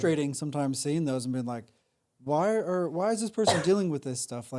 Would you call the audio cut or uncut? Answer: uncut